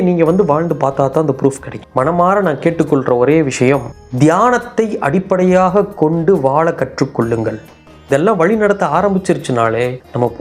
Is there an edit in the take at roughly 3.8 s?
no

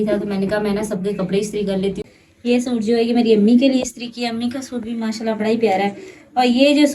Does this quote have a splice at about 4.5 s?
no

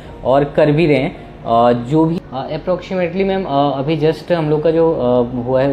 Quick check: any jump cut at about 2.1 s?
yes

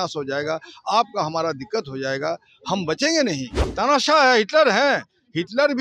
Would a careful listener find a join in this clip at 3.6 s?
yes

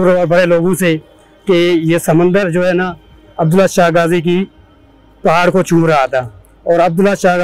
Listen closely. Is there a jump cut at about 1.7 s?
no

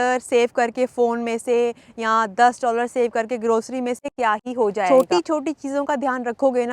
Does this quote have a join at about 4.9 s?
yes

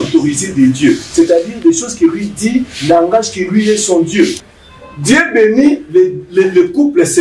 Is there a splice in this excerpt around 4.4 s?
yes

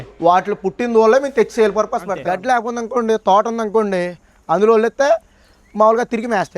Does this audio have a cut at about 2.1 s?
yes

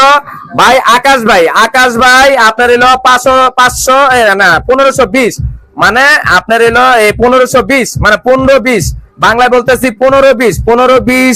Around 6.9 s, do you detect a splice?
no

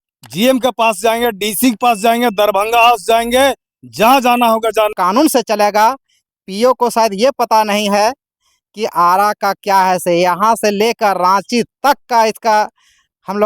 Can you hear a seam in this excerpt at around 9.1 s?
no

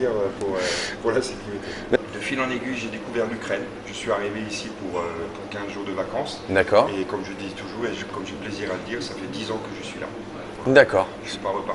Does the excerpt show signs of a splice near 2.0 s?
yes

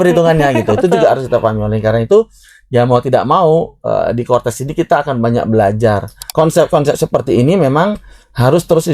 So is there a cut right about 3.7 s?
no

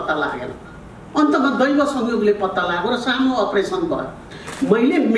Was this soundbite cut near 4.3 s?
yes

